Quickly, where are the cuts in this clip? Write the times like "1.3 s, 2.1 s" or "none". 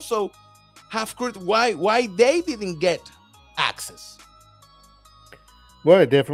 none